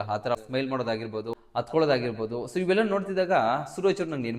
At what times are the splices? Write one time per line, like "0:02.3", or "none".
0:01.2